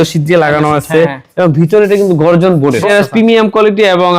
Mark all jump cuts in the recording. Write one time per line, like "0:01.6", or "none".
0:02.8